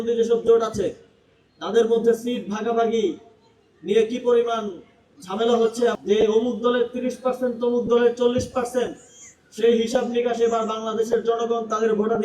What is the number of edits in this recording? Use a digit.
1